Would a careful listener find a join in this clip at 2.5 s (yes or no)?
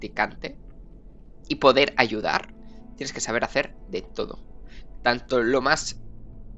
no